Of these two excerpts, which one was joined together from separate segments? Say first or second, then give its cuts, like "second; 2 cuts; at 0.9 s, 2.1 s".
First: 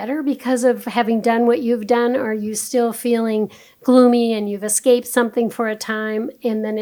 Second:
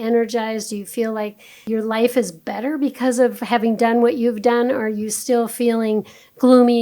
second; 1 cut; at 1.5 s